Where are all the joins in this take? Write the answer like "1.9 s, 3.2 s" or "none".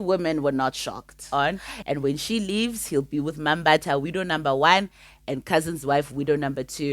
1.2 s